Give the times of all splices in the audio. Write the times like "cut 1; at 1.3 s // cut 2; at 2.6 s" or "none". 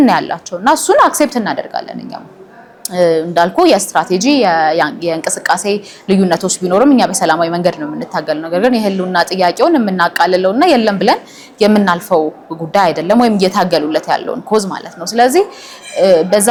none